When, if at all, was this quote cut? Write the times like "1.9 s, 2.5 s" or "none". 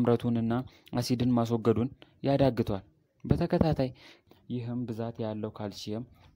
4.1 s

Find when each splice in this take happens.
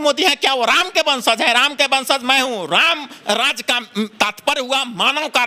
none

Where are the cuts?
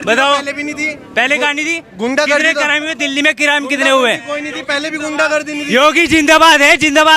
none

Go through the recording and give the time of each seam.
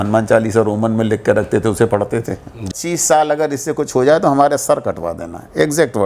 2.7 s

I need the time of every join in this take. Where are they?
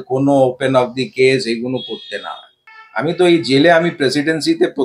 2.6 s

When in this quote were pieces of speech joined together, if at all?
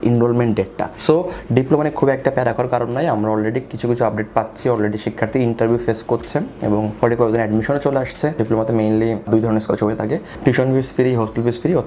8.4 s, 9.3 s

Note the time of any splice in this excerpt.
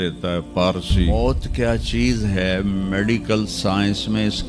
1.1 s

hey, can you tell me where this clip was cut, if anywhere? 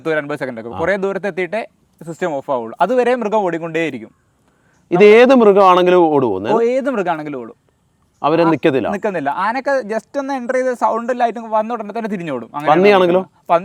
none

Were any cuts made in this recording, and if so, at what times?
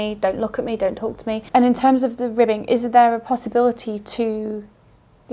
none

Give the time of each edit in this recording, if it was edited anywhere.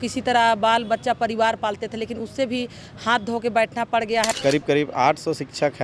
4.3 s

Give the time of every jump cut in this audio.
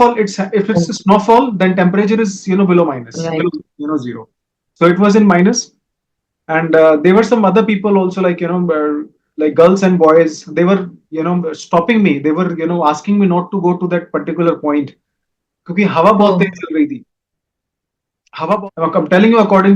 18.6 s

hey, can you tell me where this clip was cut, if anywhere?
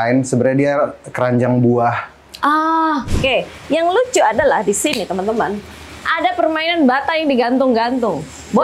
3.1 s

